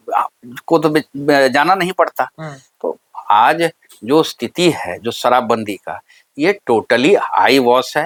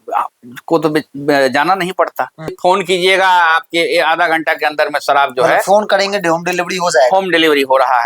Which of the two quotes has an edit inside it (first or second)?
second